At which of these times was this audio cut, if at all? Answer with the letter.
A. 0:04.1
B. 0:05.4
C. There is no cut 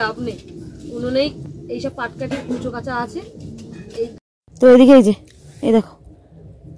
A